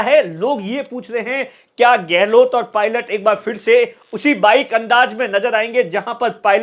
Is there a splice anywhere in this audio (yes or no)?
no